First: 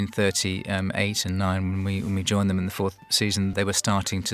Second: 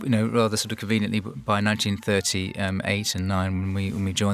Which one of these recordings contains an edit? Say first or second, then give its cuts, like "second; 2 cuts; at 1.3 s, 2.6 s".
first; 1 cut; at 3.4 s